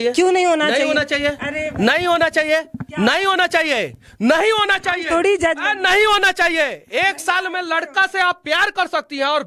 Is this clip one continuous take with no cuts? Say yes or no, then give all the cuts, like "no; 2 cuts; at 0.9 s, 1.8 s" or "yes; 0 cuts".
yes; 0 cuts